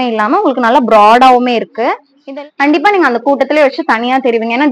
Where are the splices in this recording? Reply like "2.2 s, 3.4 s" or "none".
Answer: 2.1 s